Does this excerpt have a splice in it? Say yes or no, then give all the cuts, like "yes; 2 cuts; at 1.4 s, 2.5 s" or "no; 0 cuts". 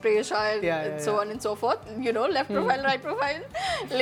no; 0 cuts